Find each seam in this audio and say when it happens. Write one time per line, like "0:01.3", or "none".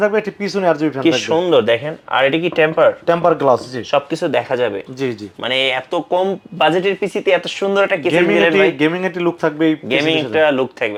none